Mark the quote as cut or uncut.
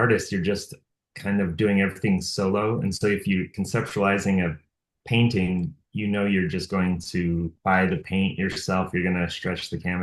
cut